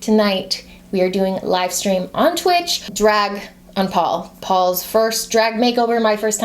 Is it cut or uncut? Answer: cut